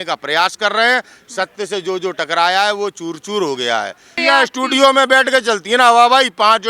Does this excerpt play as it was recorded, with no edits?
no; 1 cut; at 4.1 s

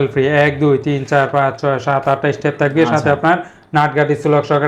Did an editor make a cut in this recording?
no; 0 cuts

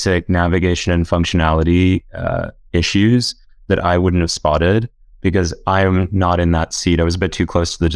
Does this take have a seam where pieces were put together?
no; 0 cuts

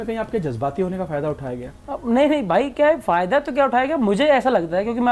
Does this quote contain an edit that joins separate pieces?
yes; 1 cut; at 1.7 s

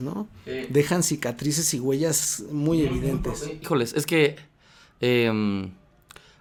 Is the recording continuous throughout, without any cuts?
yes; 0 cuts

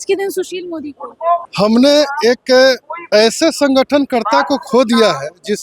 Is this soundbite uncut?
no; 1 cut; at 1.4 s

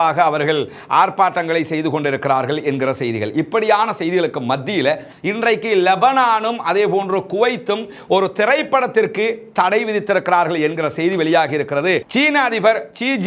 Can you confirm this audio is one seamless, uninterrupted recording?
no; 2 cuts; at 5.1 s, 12.1 s

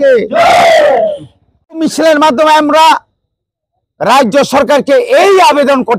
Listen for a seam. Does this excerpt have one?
yes; 1 cut; at 1.8 s

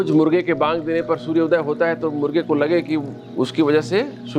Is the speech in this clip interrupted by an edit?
no; 0 cuts

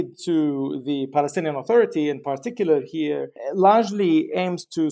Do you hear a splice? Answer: no; 0 cuts

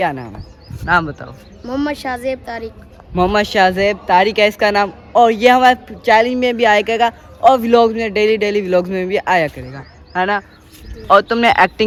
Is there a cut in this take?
no; 0 cuts

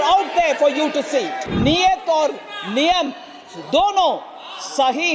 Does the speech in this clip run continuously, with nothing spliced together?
no; 1 cut; at 1.4 s

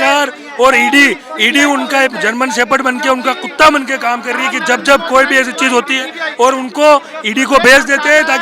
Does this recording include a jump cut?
no; 0 cuts

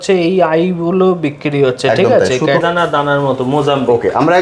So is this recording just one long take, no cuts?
no; 1 cut; at 2.6 s

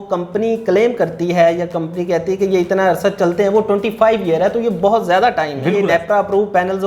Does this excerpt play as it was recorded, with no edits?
no; 1 cut; at 5.8 s

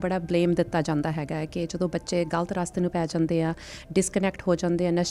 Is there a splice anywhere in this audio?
no; 0 cuts

